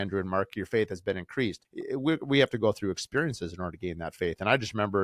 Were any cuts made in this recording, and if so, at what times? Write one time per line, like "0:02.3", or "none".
0:01.7